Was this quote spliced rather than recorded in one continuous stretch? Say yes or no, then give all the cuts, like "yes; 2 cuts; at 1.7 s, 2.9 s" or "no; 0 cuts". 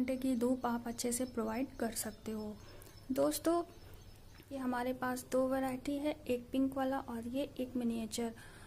yes; 1 cut; at 4.5 s